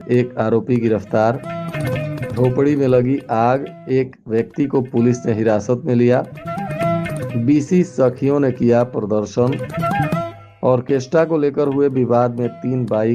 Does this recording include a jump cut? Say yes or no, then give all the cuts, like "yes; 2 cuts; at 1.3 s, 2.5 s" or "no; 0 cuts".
no; 0 cuts